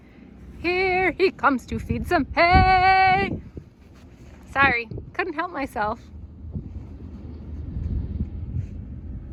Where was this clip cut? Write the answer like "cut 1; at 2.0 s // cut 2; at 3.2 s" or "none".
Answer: none